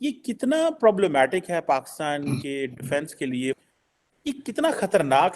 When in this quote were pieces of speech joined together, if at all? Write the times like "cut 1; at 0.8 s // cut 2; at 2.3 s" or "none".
cut 1; at 3.6 s